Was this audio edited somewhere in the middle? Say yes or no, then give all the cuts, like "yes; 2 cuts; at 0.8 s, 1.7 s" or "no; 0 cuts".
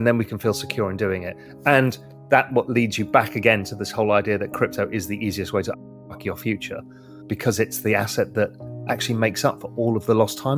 yes; 1 cut; at 7.2 s